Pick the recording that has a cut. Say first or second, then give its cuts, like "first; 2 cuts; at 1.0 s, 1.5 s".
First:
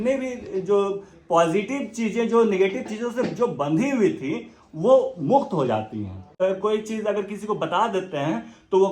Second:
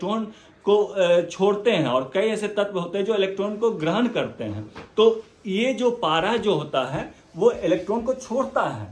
first; 1 cut; at 6.2 s